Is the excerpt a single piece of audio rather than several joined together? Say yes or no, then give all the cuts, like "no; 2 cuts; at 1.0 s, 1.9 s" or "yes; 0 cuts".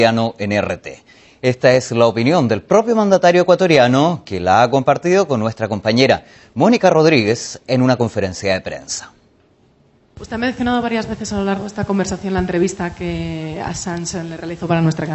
no; 1 cut; at 8.4 s